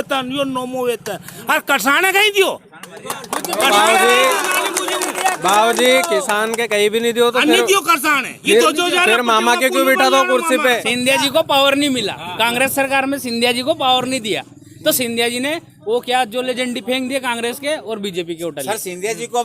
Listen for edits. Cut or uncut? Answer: cut